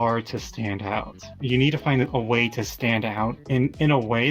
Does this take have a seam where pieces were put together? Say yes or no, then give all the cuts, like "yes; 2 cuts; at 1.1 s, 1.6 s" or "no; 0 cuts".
yes; 2 cuts; at 1.4 s, 3.4 s